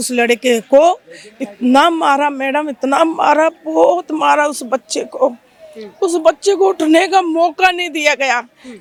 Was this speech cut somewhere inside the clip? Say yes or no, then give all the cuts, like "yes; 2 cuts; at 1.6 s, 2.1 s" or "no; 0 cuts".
no; 0 cuts